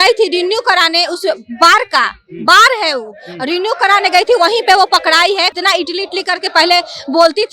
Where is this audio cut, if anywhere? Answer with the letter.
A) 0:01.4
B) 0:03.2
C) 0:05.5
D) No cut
C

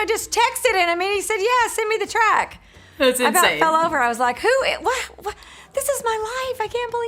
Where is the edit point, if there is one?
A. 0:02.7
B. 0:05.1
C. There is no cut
C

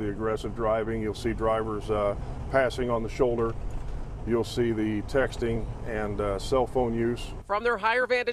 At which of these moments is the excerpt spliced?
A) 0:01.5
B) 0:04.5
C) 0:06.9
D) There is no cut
D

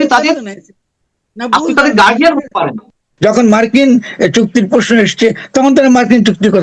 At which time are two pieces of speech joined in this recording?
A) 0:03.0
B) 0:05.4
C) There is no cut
A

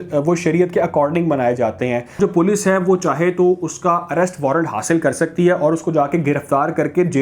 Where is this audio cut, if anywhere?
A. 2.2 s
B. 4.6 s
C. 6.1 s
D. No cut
A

